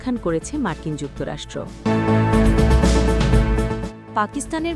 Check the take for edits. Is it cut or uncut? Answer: cut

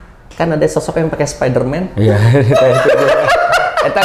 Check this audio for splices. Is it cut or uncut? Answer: cut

